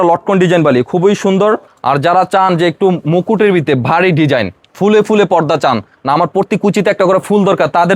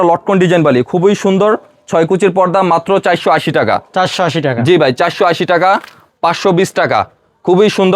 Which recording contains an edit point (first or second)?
first